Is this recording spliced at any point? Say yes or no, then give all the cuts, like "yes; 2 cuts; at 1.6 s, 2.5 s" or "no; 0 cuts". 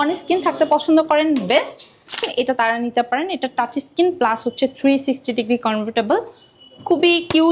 yes; 1 cut; at 2.3 s